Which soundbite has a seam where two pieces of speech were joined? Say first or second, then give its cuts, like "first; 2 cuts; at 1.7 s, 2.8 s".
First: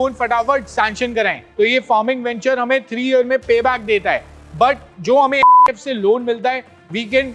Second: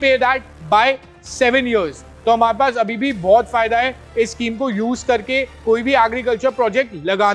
first; 1 cut; at 1.4 s